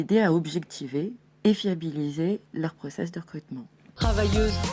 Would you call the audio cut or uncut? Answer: cut